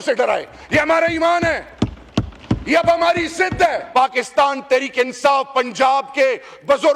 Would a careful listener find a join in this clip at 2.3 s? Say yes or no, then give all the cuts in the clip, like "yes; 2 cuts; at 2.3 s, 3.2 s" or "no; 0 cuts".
no; 1 cut; at 3.8 s